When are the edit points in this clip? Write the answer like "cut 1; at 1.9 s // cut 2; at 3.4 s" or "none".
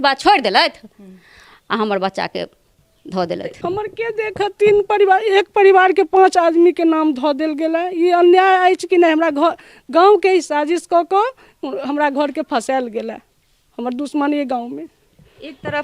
cut 1; at 3.5 s